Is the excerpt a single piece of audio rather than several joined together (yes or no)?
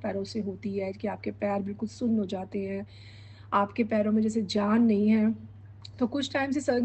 yes